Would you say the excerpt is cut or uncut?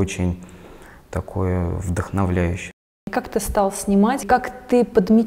cut